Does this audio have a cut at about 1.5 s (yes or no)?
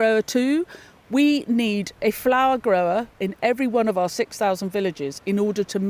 no